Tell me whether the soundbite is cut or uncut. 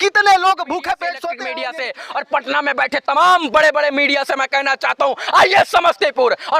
cut